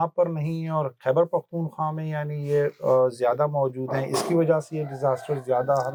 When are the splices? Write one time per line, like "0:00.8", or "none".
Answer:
none